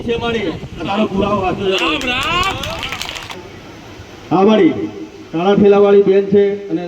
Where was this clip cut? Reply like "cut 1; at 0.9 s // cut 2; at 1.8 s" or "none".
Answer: cut 1; at 3.3 s

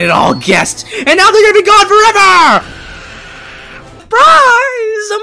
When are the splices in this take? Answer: cut 1; at 4.0 s

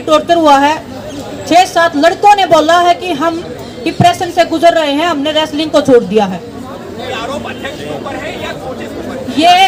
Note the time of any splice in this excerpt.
none

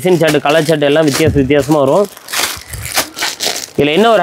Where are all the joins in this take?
none

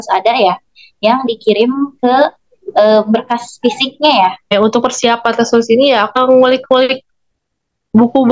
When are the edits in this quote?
cut 1; at 4.5 s // cut 2; at 6.1 s

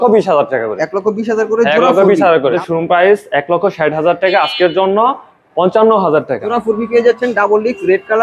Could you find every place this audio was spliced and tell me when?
cut 1; at 2.5 s // cut 2; at 6.5 s

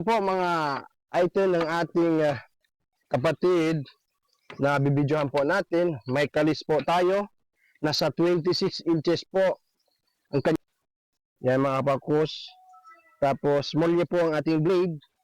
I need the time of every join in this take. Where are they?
cut 1; at 10.6 s

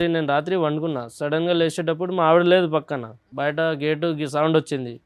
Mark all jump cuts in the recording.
cut 1; at 3.3 s

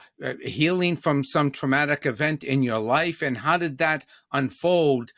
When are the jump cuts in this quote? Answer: none

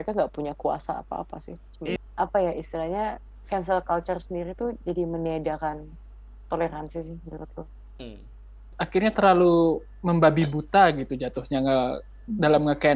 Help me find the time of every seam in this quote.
cut 1; at 2.0 s // cut 2; at 8.7 s

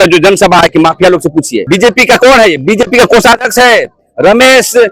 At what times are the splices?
cut 1; at 1.6 s

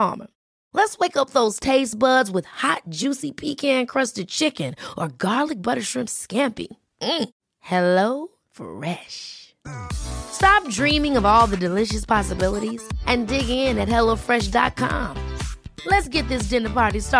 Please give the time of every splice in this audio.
none

